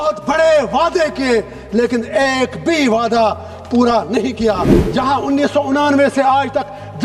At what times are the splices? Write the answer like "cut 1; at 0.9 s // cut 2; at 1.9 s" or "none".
cut 1; at 4.8 s